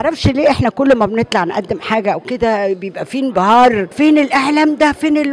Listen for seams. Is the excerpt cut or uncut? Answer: cut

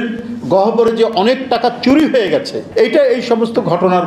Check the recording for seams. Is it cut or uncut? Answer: cut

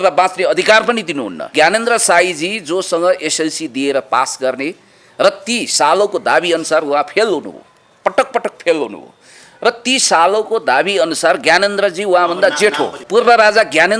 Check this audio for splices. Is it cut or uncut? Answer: cut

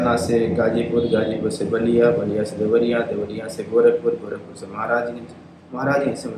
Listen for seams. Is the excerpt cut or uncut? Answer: uncut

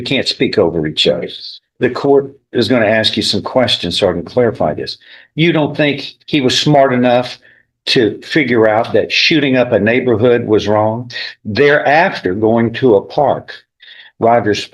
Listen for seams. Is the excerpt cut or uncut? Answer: uncut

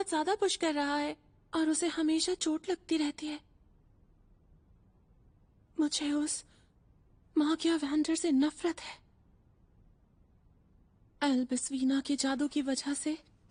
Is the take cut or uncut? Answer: uncut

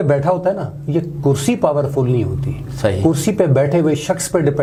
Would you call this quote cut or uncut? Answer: uncut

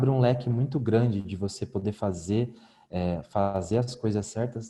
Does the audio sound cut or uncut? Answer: uncut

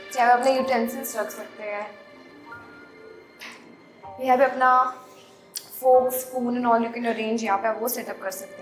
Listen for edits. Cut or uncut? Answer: uncut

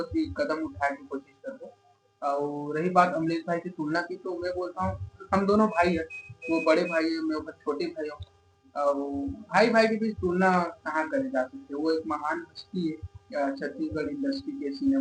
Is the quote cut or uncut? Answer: uncut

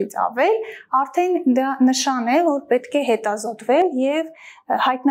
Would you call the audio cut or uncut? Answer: uncut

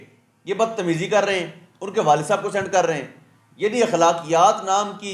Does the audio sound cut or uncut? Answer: uncut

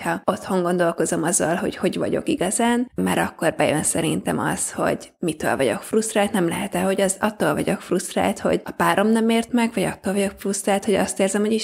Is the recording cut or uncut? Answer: cut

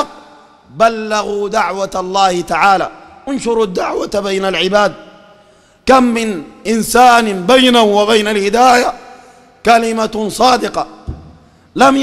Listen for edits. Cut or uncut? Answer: uncut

